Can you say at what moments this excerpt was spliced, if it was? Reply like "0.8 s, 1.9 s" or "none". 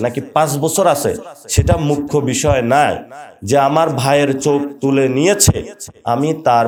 none